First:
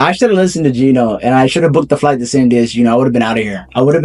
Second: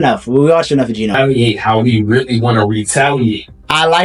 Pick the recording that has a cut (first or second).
second